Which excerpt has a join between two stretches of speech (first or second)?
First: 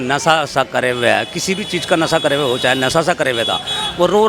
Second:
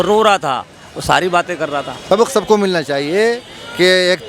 second